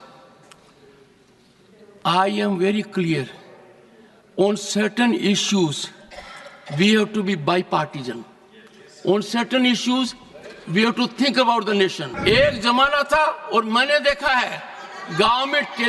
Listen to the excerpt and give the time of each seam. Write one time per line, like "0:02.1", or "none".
0:12.1

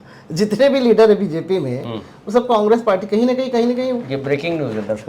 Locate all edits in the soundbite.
none

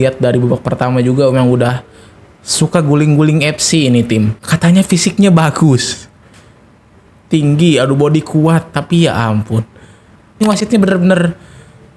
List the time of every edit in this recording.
0:04.4
0:10.4

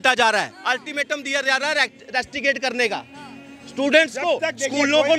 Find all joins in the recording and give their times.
none

